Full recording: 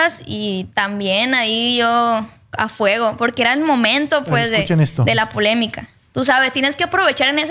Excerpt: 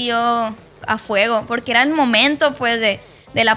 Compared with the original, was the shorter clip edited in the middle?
no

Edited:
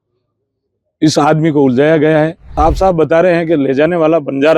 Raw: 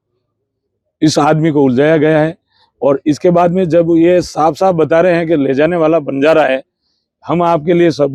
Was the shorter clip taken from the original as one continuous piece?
no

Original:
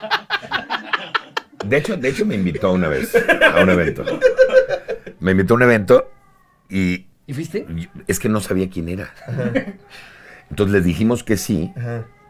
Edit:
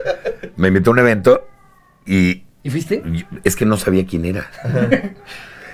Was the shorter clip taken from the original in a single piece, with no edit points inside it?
yes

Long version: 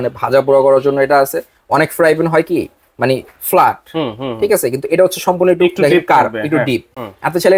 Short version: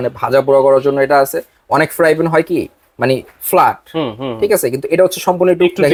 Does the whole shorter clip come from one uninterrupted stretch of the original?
yes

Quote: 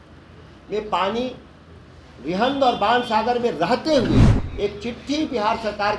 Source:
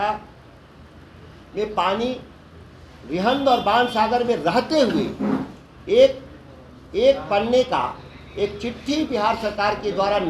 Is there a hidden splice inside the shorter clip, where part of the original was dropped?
yes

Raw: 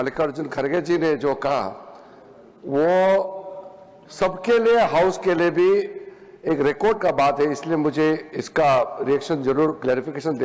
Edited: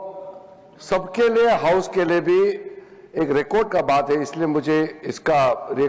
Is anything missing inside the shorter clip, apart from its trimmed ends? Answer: no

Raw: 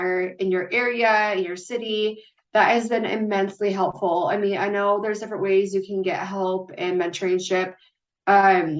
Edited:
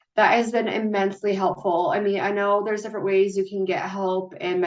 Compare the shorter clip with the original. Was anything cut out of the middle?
no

